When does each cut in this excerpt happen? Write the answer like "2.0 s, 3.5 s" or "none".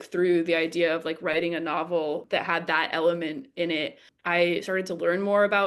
2.2 s, 4.1 s